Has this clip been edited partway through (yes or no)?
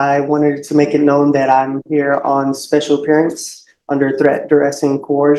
no